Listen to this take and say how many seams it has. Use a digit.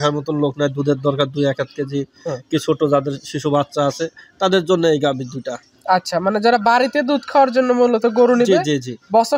0